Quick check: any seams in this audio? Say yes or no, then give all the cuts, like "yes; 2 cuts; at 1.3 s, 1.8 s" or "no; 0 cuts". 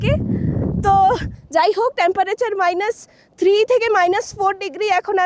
yes; 1 cut; at 1.3 s